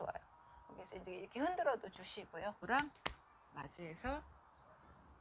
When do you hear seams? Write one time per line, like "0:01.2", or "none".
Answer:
0:02.6

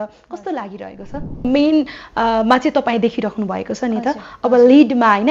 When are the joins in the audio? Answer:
0:01.4

